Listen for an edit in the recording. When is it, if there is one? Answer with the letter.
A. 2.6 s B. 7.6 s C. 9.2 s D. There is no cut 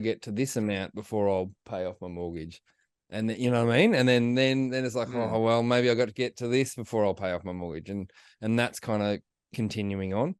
D